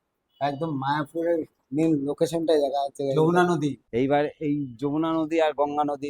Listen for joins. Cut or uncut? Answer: cut